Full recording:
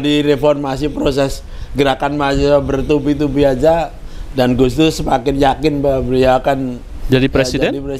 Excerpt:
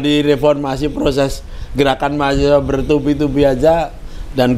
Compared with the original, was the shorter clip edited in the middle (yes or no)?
no